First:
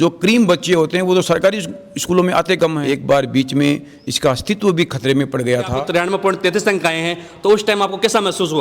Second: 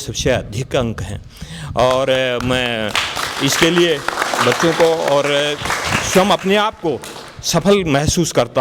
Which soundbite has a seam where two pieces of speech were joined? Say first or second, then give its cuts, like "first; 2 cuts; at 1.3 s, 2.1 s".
first; 2 cuts; at 2.8 s, 5.8 s